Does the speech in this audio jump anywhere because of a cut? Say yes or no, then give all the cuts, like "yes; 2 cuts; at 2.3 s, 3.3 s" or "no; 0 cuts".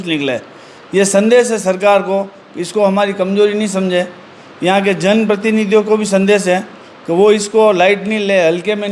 no; 0 cuts